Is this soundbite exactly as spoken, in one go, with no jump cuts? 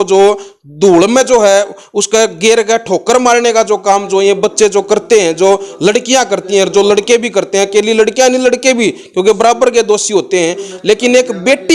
yes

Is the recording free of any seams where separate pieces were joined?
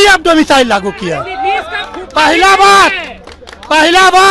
yes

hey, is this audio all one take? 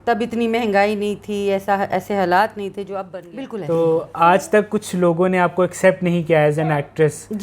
no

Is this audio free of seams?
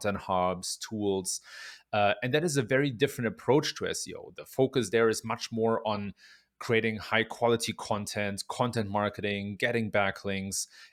yes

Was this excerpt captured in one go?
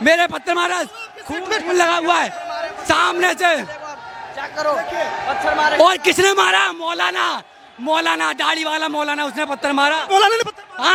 yes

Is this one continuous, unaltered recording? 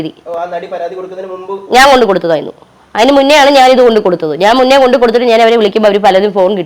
yes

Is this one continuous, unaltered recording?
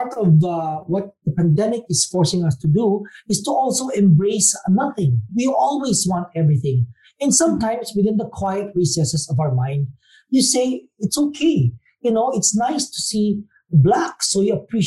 no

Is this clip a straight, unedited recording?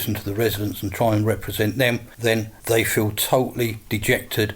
no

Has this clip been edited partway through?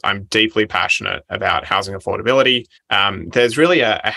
yes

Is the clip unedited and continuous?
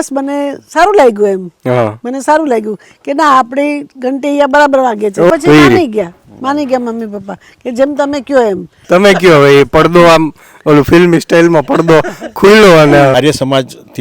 no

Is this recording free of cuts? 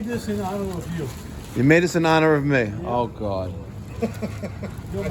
yes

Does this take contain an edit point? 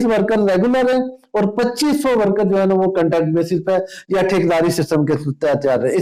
no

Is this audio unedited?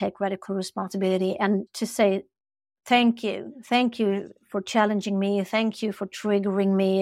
no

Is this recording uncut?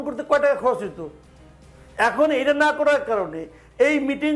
yes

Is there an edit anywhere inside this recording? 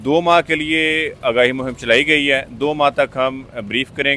no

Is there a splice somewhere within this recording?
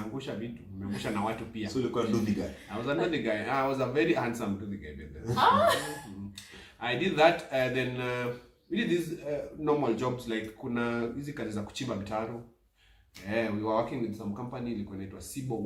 no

